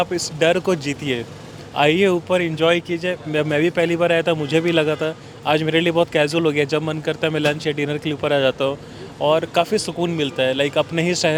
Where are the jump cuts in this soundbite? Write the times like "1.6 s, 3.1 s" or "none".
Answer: none

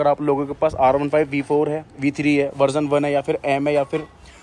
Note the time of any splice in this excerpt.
none

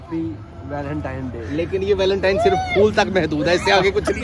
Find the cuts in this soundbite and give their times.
none

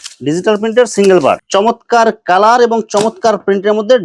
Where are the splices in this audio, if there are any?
1.4 s

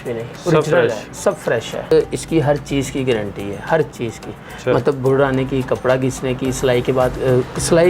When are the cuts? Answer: 1.9 s

